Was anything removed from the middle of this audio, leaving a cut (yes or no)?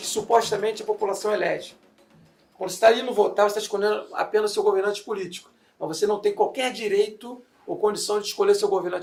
no